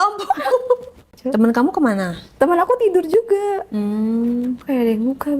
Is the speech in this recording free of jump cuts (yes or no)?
no